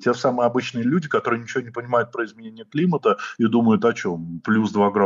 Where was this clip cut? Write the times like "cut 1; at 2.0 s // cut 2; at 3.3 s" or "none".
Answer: none